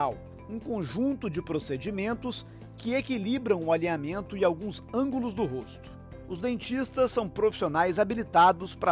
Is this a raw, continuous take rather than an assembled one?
yes; 0 cuts

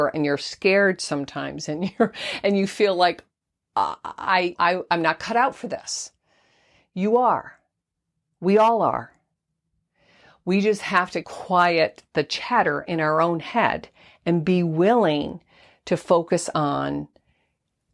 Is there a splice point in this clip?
yes; 1 cut; at 4.5 s

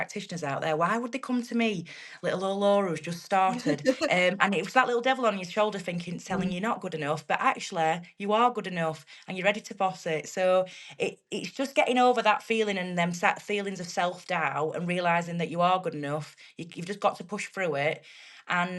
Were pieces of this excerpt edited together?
no; 0 cuts

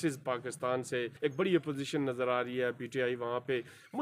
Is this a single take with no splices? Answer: no; 1 cut; at 1.1 s

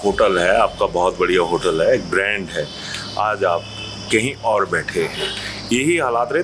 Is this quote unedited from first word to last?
yes; 0 cuts

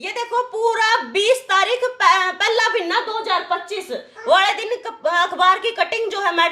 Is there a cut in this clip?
no; 0 cuts

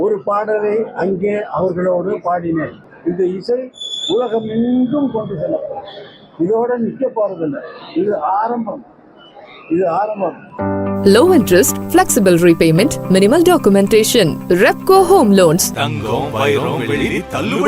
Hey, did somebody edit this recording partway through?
yes; 2 cuts; at 2.8 s, 10.6 s

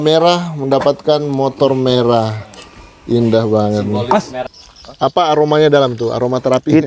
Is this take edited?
yes; 1 cut; at 4.4 s

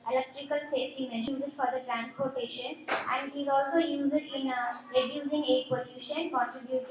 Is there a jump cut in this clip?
yes; 1 cut; at 1.3 s

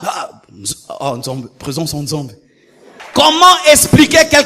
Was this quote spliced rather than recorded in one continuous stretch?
yes; 1 cut; at 3.0 s

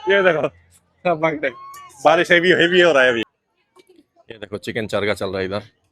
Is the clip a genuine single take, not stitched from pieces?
no; 1 cut; at 3.2 s

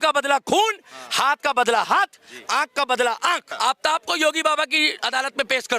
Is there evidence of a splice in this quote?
yes; 1 cut; at 3.5 s

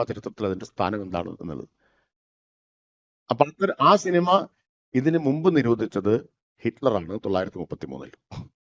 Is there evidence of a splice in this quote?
no; 0 cuts

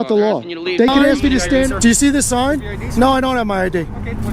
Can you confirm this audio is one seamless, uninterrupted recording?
no; 1 cut; at 1.7 s

